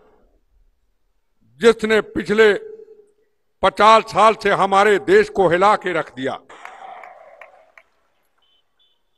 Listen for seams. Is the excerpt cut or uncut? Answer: cut